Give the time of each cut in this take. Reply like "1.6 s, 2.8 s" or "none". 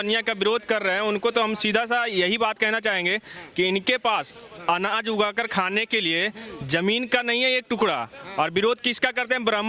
none